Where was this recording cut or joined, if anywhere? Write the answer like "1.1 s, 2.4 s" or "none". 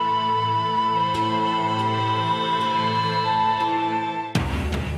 none